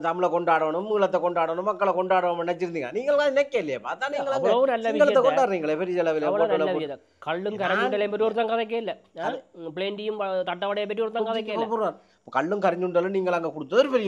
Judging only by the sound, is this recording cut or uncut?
uncut